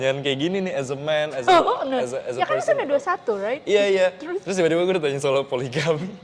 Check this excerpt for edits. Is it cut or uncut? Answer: uncut